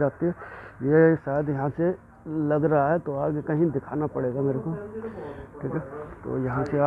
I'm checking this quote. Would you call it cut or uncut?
uncut